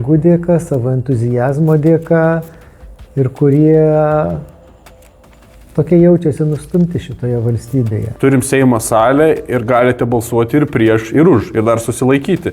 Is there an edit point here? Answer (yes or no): yes